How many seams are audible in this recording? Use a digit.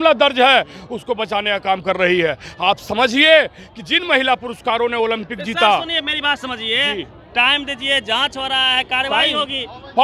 0